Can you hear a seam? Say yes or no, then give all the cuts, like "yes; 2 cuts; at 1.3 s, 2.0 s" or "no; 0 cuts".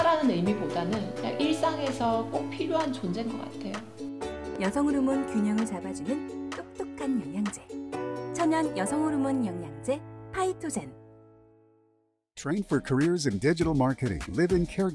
yes; 1 cut; at 12.2 s